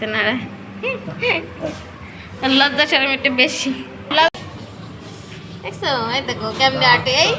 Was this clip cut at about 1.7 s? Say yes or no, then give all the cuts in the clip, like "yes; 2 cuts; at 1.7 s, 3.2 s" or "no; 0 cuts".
no; 1 cut; at 4.3 s